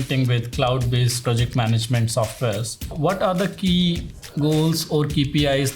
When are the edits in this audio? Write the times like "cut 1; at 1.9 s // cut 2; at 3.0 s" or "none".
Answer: cut 1; at 1.2 s // cut 2; at 2.9 s